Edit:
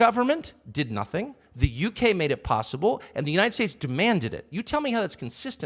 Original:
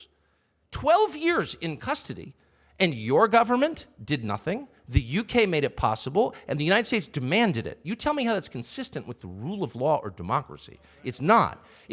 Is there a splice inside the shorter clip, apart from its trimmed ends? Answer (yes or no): no